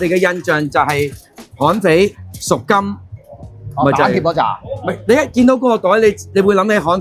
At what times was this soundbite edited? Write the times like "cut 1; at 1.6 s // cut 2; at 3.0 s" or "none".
none